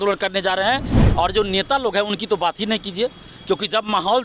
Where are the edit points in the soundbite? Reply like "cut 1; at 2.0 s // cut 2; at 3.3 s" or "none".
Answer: cut 1; at 1.0 s